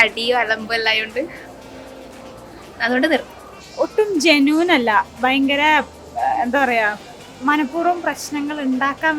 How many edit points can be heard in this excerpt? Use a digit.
0